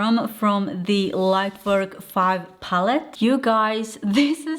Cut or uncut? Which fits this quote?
cut